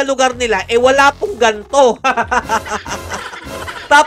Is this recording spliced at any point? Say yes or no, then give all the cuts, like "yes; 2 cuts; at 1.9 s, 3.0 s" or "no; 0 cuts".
no; 0 cuts